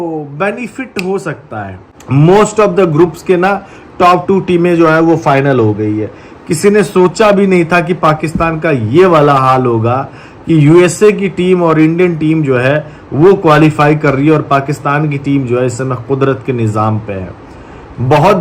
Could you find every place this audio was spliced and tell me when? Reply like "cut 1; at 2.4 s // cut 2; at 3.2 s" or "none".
cut 1; at 2.0 s